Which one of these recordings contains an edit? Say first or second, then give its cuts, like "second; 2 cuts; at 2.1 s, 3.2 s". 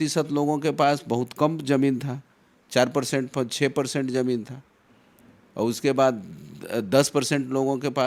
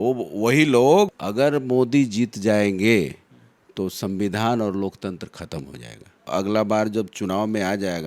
second; 2 cuts; at 1.1 s, 6.2 s